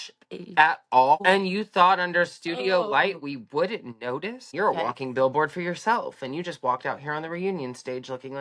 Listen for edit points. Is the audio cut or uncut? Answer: cut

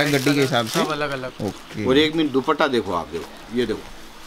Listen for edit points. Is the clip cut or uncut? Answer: uncut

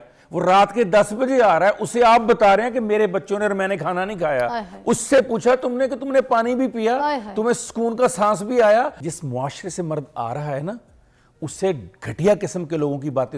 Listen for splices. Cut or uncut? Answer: cut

